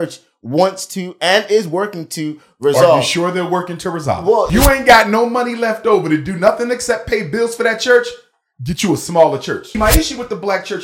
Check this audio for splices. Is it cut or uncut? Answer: cut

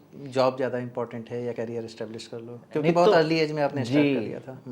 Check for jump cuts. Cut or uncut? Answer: cut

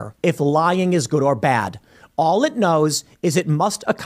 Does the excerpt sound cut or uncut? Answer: uncut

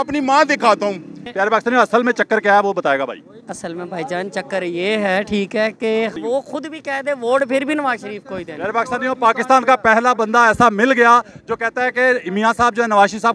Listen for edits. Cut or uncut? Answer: cut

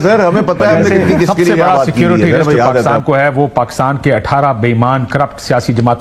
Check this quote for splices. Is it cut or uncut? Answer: cut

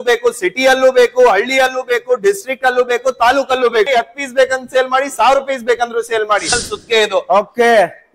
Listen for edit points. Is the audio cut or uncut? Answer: cut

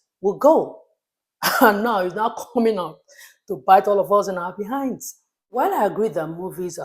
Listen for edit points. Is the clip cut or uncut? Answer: cut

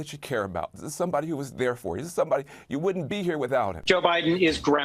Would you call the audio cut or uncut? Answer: cut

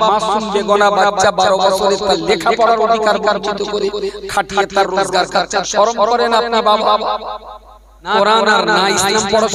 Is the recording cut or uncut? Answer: cut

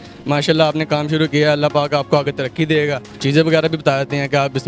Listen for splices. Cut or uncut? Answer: cut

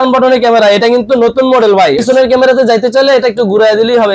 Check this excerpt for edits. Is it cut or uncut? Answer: cut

